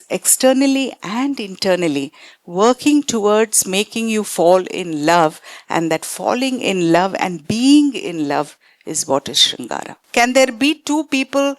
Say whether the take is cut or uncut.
cut